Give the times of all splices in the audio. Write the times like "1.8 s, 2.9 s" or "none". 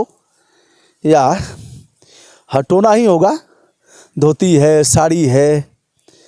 none